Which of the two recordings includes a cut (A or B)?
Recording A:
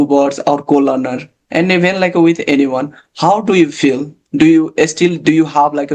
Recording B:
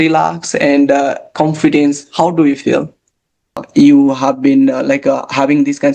B